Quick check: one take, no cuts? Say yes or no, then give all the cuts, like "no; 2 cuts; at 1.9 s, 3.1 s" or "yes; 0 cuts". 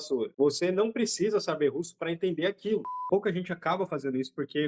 no; 1 cut; at 3.0 s